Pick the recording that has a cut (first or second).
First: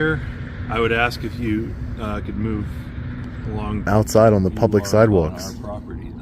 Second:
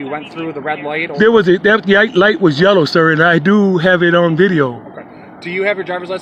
first